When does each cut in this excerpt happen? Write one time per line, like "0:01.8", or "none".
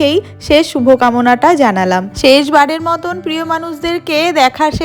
none